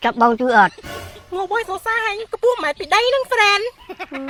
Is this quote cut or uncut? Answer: uncut